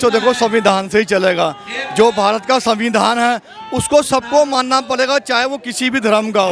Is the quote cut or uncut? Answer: uncut